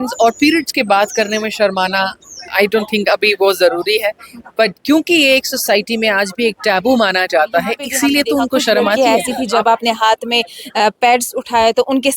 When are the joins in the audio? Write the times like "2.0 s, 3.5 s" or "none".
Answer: 9.0 s